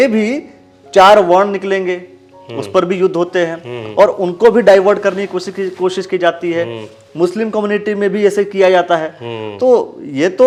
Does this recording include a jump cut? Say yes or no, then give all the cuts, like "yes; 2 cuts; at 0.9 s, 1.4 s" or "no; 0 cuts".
no; 0 cuts